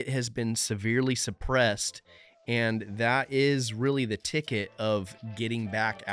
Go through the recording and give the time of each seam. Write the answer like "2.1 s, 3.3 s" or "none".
none